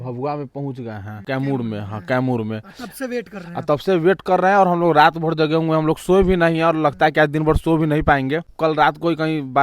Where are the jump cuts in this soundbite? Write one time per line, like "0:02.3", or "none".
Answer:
0:01.1
0:08.5